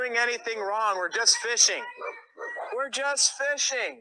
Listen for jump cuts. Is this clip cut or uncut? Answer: uncut